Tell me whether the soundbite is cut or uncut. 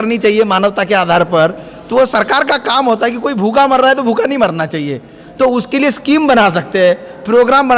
uncut